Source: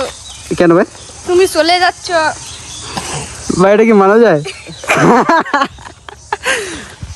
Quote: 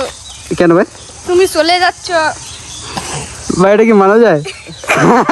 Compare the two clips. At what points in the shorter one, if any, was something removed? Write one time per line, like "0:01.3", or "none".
none